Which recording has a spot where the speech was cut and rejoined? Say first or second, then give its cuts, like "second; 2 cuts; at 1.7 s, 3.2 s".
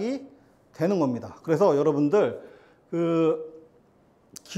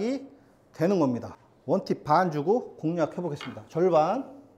second; 1 cut; at 1.3 s